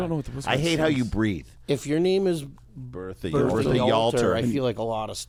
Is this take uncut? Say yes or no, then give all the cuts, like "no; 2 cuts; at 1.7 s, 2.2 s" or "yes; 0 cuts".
yes; 0 cuts